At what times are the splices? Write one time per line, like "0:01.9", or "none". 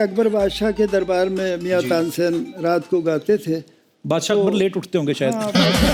none